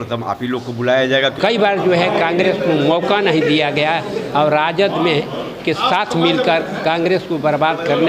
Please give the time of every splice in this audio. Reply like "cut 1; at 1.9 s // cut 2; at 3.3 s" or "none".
cut 1; at 1.3 s